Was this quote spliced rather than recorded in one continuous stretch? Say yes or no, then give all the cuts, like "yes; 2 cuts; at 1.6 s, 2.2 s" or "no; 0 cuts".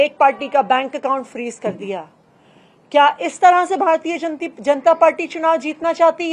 no; 0 cuts